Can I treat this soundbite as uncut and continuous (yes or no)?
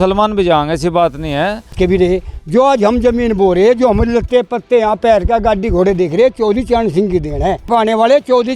no